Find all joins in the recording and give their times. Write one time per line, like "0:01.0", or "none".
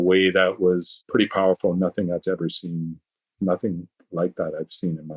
0:00.9